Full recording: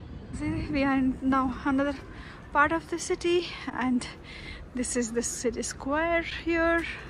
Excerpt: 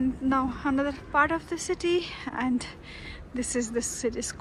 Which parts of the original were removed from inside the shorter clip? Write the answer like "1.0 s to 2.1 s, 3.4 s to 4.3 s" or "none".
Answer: 2.0 s to 2.4 s